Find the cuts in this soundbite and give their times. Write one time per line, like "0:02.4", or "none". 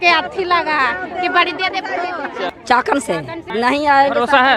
0:02.5
0:03.5